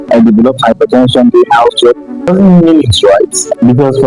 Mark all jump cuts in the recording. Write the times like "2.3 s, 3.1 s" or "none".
2.3 s